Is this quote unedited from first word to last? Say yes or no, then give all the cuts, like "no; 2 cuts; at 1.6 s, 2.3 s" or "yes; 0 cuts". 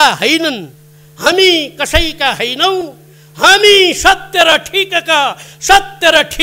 yes; 0 cuts